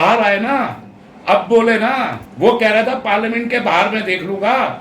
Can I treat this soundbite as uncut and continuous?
no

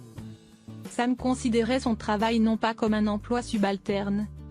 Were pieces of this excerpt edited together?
yes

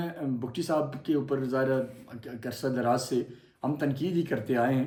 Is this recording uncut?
yes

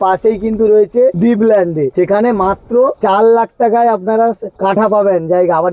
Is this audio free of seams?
no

